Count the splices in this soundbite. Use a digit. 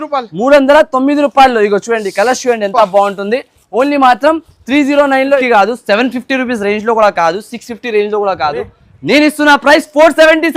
1